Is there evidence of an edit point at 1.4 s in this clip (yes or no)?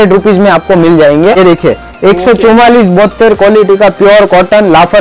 yes